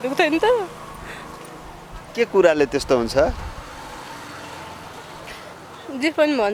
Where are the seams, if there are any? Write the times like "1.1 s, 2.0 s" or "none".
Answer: none